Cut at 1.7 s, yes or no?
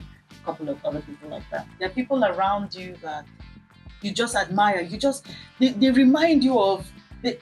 yes